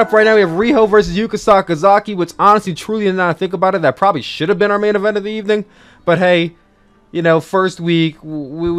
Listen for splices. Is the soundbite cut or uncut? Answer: uncut